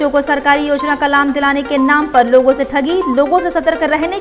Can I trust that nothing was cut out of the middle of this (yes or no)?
yes